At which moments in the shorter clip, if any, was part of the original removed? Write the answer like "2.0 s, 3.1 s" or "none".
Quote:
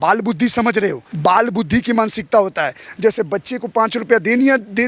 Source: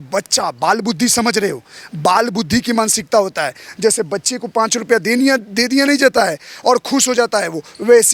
1.1 s